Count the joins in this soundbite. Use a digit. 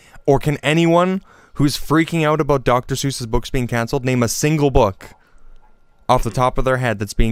0